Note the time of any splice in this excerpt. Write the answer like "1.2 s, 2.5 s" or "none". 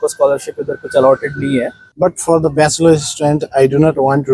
1.8 s